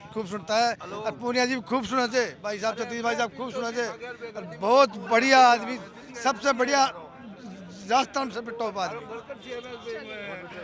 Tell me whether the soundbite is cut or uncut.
uncut